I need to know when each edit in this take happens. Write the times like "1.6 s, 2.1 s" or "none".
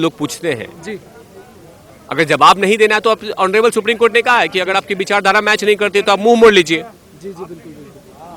none